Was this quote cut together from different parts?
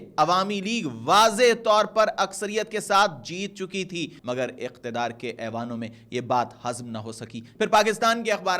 yes; 2 cuts; at 4.1 s, 7.5 s

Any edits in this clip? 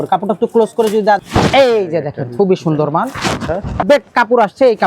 yes; 2 cuts; at 1.2 s, 3.8 s

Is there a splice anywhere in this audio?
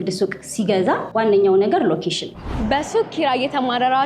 yes; 2 cuts; at 1.1 s, 2.3 s

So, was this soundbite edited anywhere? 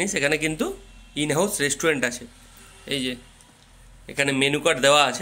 no; 0 cuts

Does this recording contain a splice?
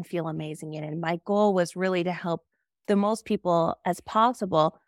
no; 0 cuts

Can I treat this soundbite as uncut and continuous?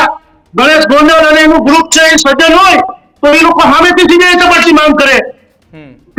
yes; 0 cuts

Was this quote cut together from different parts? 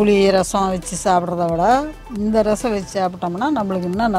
no; 0 cuts

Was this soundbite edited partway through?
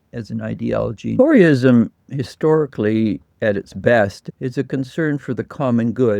yes; 2 cuts; at 1.2 s, 4.2 s

